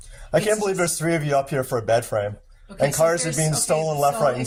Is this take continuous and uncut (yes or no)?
yes